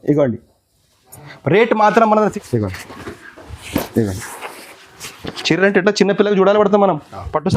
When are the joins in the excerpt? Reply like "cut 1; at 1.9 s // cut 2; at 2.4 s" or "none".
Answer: cut 1; at 2.3 s